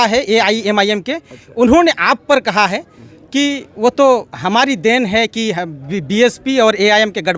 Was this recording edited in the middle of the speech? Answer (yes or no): no